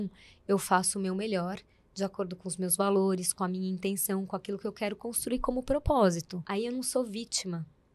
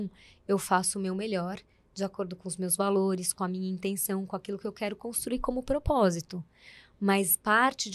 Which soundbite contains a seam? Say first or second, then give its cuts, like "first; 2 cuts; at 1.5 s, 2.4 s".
first; 1 cut; at 6.4 s